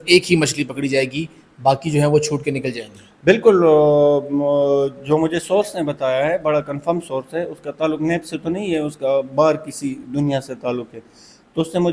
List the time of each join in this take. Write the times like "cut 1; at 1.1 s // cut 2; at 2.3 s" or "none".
none

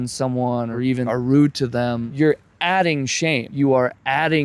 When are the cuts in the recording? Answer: cut 1; at 2.1 s // cut 2; at 3.5 s

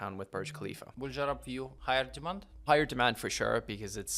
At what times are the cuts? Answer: cut 1; at 0.9 s // cut 2; at 1.7 s

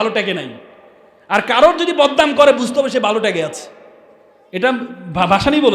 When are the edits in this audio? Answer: none

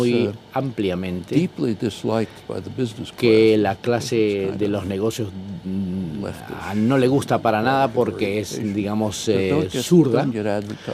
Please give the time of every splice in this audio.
cut 1; at 3.0 s

